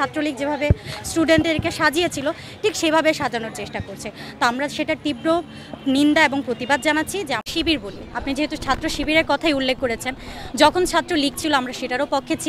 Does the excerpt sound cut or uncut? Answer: cut